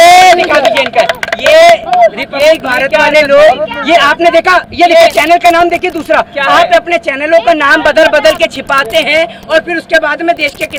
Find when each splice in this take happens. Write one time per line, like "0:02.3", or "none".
none